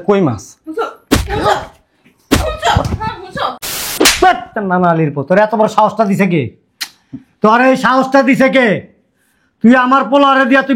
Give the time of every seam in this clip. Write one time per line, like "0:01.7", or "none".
0:03.9